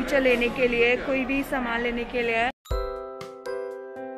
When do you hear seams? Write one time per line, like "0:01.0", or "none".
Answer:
0:02.6